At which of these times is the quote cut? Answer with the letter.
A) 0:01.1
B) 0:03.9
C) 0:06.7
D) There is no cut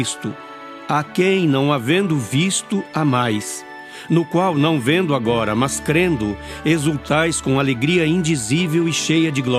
C